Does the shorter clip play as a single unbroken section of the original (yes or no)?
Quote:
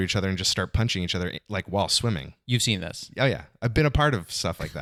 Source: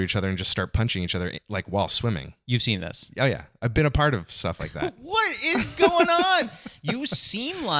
yes